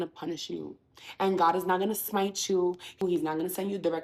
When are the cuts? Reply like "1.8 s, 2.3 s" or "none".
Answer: 3.0 s